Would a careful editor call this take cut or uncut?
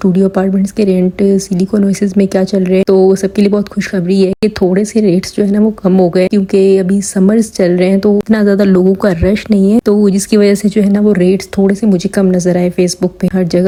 uncut